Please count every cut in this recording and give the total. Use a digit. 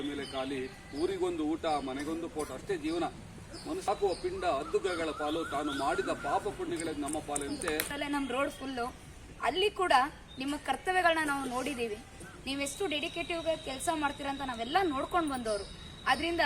2